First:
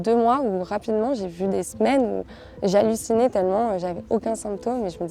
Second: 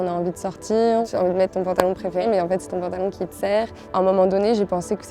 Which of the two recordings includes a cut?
second; 3 cuts; at 1.1 s, 2.2 s, 3.8 s

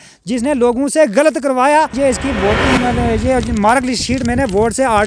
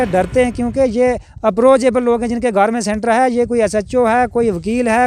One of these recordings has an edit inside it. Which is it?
first; 1 cut; at 1.9 s

